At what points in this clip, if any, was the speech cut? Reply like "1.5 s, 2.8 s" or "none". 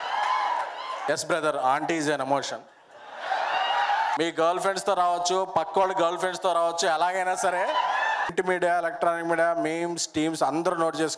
1.0 s, 4.2 s, 8.3 s